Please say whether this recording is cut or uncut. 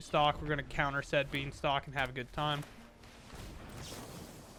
uncut